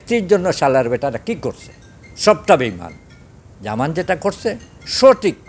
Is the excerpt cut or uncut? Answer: uncut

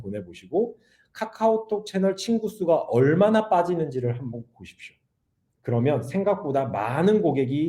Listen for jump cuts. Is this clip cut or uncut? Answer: uncut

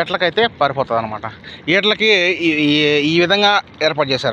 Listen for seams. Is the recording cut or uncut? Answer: uncut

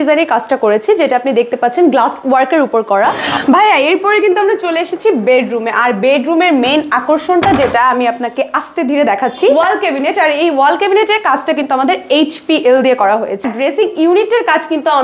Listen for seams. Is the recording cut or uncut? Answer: cut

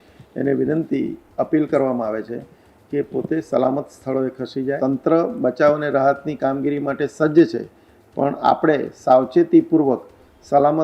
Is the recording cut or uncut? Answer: cut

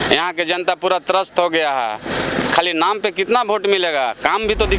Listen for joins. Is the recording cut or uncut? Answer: uncut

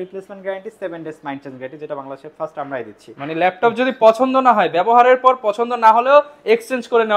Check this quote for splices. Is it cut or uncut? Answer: uncut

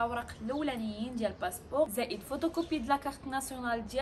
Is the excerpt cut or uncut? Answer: cut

